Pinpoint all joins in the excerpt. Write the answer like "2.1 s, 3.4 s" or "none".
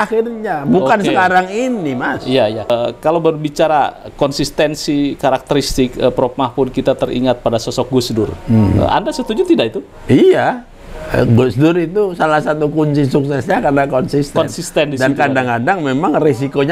2.7 s